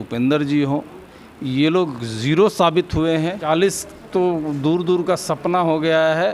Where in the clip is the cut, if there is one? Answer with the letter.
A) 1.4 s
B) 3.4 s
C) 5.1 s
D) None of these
B